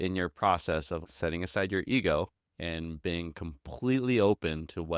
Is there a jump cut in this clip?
yes; 1 cut; at 1.0 s

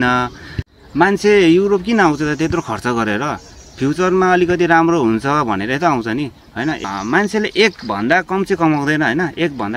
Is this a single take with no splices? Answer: no; 2 cuts; at 0.9 s, 6.8 s

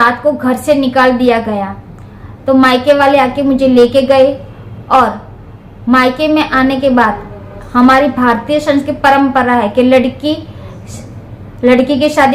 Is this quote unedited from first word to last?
yes; 0 cuts

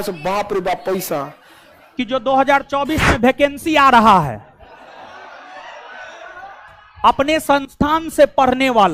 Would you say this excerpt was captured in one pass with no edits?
no; 1 cut; at 1.9 s

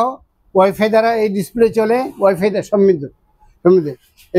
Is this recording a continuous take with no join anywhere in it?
yes; 0 cuts

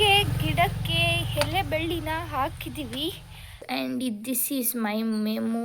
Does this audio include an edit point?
yes; 1 cut; at 3.6 s

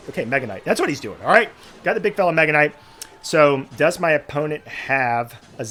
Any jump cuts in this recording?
no; 0 cuts

